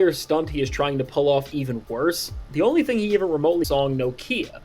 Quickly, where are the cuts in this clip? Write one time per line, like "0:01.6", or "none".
0:03.7

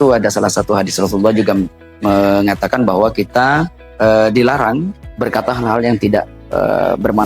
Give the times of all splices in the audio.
0:01.8
0:03.8
0:05.0
0:06.4

